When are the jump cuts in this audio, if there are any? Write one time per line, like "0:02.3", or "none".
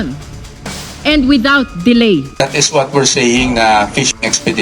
0:02.3